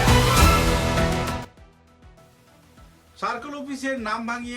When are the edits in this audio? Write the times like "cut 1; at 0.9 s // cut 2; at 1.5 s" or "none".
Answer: cut 1; at 1.5 s